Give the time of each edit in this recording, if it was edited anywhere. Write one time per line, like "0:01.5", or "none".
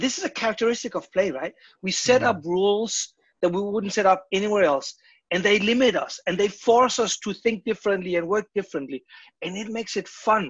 none